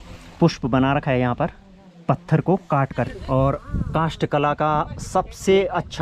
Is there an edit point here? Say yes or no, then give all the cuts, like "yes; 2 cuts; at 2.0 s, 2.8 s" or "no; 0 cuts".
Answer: yes; 1 cut; at 3.1 s